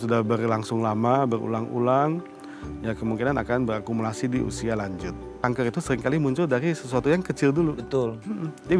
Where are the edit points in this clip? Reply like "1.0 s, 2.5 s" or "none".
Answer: 5.4 s

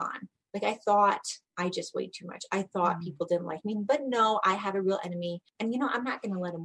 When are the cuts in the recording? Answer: 1.4 s, 5.5 s

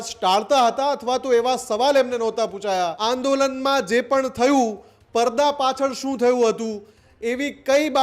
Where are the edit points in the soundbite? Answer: 3.0 s

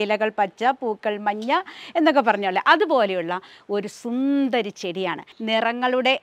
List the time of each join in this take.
5.3 s

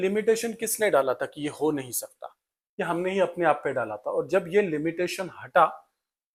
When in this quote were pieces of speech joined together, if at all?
none

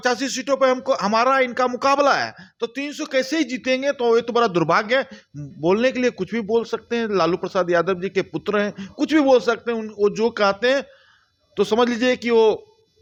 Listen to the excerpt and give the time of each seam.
none

